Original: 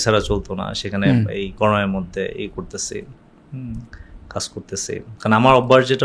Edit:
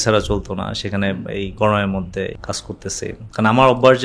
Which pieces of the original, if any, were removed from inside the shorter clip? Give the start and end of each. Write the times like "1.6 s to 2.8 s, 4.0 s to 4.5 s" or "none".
2.4 s to 4.2 s